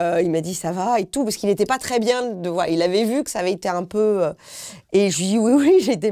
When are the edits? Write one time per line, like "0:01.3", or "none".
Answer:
none